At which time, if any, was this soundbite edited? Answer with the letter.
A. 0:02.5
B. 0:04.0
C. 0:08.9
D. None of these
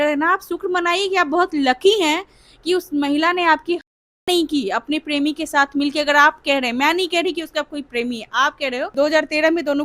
C